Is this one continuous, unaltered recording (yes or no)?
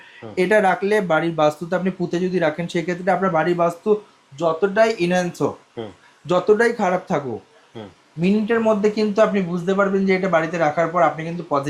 yes